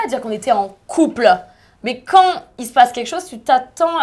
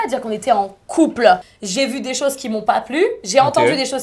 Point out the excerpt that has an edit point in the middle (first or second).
second